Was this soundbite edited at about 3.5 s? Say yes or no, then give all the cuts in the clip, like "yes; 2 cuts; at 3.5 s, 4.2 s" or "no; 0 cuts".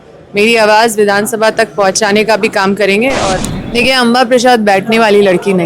yes; 1 cut; at 3.5 s